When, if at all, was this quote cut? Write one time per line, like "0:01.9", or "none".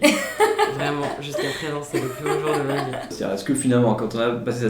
0:03.1